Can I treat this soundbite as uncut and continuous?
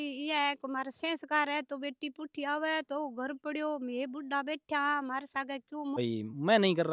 no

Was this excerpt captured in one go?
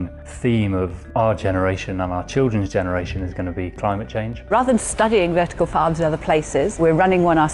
no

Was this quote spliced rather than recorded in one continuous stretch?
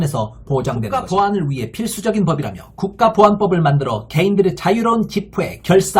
yes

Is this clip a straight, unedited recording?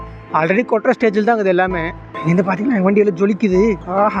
no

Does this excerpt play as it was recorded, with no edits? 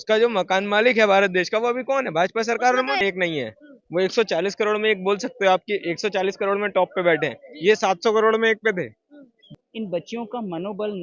no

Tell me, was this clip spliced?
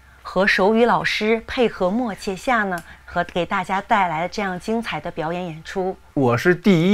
yes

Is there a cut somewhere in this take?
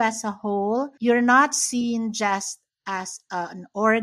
yes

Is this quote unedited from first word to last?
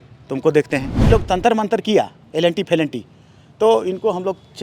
no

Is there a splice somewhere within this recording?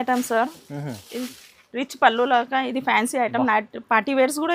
no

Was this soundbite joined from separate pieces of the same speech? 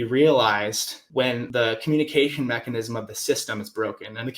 yes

